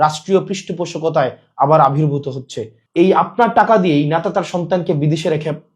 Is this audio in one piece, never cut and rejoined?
no; 1 cut; at 2.8 s

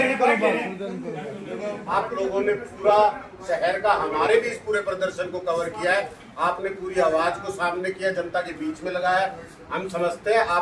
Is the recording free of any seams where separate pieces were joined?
no; 1 cut; at 1.9 s

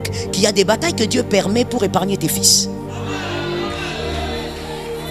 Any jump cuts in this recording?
no; 0 cuts

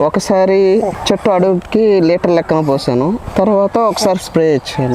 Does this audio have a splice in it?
yes; 2 cuts; at 1.0 s, 3.2 s

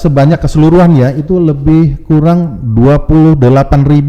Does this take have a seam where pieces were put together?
no; 0 cuts

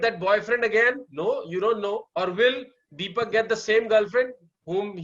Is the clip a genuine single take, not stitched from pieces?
no; 1 cut; at 2.1 s

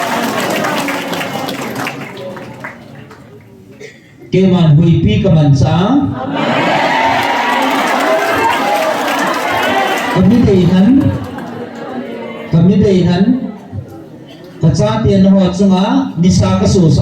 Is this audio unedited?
no; 1 cut; at 3.3 s

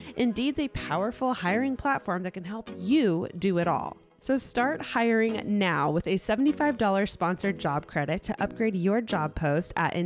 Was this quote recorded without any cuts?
no; 1 cut; at 3.9 s

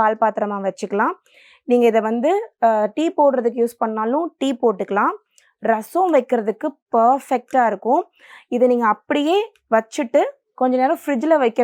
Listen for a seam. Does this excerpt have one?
no; 0 cuts

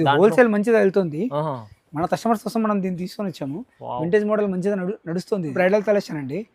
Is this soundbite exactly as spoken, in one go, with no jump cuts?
no; 1 cut; at 5.5 s

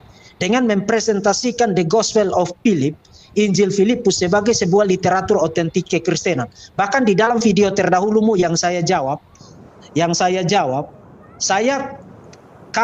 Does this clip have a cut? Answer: no; 0 cuts

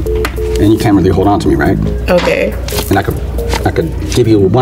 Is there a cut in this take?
no; 0 cuts

